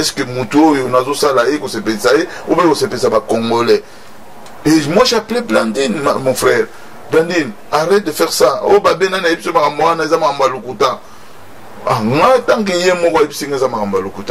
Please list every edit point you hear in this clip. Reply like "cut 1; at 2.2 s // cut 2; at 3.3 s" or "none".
none